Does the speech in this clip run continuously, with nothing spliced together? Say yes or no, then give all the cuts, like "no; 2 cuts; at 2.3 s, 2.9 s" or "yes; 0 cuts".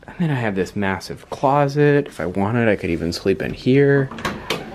yes; 0 cuts